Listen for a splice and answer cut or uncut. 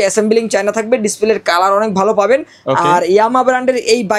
uncut